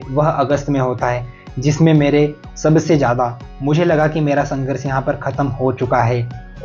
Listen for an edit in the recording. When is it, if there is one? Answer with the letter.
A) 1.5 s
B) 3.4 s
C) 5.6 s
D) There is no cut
B